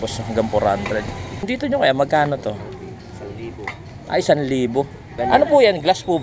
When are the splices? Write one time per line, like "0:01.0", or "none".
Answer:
0:01.3
0:05.1